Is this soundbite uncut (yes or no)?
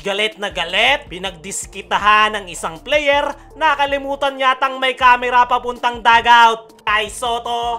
no